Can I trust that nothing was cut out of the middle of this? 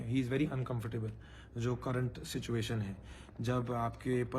yes; 0 cuts

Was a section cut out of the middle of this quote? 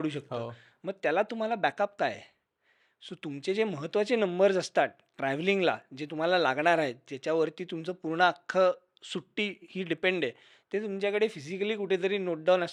no; 0 cuts

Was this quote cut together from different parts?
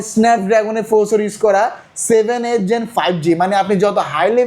no; 0 cuts

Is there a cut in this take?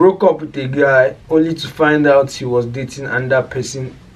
no; 0 cuts

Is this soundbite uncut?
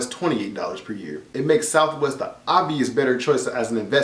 no; 1 cut; at 1.3 s

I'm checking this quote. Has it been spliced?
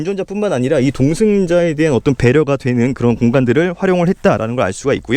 no; 0 cuts

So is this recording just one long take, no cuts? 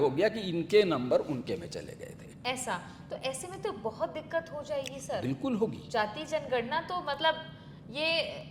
yes; 0 cuts

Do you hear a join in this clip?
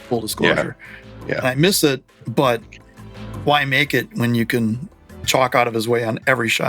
yes; 1 cut; at 5.2 s

